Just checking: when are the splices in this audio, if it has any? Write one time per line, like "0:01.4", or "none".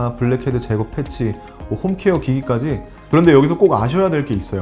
0:02.9